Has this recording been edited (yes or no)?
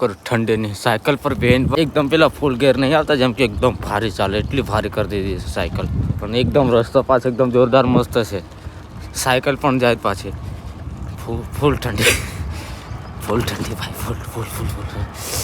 yes